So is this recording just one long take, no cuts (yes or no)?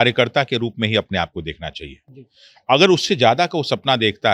yes